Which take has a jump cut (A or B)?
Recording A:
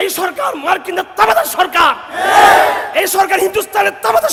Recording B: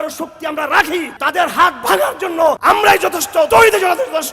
B